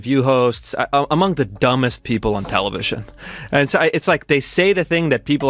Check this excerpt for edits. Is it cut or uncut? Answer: uncut